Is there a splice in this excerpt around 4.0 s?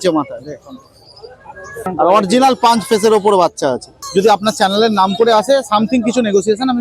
yes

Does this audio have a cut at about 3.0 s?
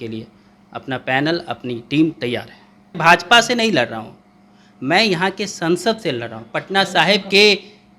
yes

